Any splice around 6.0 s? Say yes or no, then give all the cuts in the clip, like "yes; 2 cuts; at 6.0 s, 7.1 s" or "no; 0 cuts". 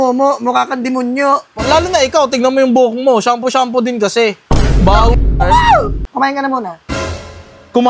yes; 1 cut; at 6.0 s